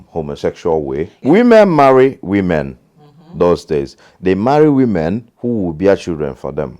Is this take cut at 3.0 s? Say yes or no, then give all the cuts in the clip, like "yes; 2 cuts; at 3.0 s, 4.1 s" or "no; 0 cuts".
no; 2 cuts; at 1.2 s, 5.3 s